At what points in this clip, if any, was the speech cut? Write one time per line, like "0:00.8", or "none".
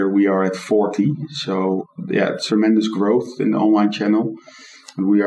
0:02.1